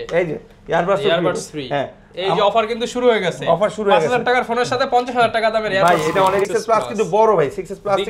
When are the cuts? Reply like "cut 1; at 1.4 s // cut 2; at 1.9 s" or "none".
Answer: cut 1; at 6.5 s